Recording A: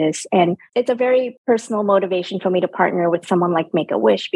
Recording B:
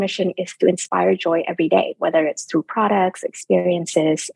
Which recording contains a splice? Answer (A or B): A